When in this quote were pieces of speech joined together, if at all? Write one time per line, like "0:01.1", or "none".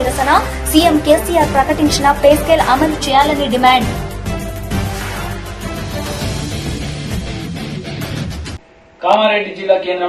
0:08.7